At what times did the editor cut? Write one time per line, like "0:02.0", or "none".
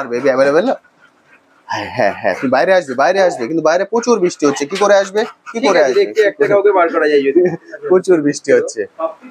none